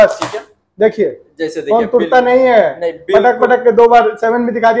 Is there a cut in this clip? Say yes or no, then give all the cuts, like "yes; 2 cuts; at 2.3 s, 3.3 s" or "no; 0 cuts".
no; 0 cuts